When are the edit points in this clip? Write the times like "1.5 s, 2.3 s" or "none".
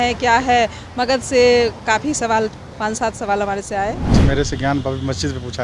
4.0 s